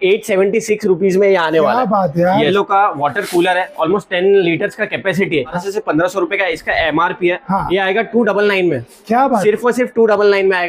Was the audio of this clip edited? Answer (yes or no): yes